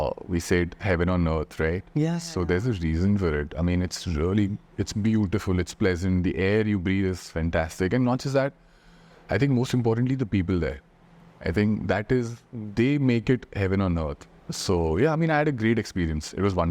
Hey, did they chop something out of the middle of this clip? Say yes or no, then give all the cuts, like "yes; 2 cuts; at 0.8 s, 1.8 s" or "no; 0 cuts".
no; 0 cuts